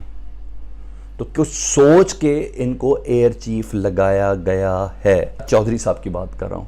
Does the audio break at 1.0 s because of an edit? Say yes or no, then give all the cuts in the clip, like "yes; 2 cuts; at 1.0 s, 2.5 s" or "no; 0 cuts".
no; 1 cut; at 5.4 s